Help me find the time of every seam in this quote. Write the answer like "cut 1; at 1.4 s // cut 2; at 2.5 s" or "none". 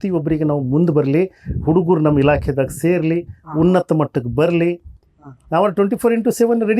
cut 1; at 5.0 s